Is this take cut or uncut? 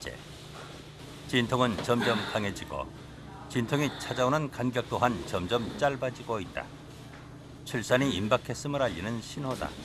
uncut